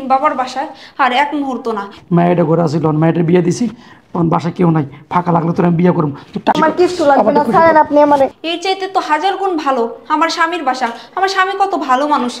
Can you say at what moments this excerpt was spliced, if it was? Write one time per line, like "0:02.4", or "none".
0:06.6